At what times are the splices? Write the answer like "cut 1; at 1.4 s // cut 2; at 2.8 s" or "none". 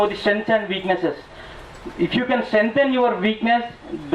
none